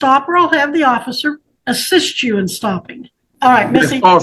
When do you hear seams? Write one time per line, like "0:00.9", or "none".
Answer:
0:01.5
0:03.2